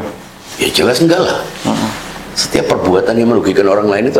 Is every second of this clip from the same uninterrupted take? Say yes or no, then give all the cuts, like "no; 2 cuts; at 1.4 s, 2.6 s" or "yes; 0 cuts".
yes; 0 cuts